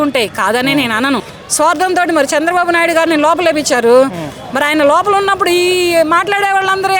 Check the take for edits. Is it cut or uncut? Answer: cut